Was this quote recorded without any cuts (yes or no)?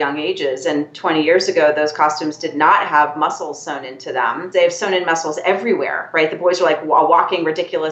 no